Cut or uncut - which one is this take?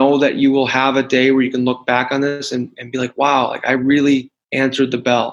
cut